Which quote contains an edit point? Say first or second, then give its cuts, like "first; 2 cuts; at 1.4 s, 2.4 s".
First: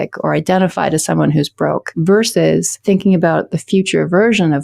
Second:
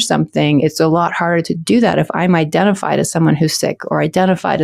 first; 2 cuts; at 1.9 s, 2.7 s